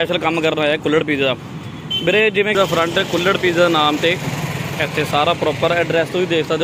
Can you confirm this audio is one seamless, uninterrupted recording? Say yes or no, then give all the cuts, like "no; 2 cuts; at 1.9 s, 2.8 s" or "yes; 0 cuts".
no; 1 cut; at 2.6 s